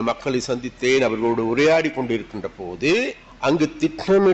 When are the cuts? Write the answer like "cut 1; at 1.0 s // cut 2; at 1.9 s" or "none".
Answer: cut 1; at 3.2 s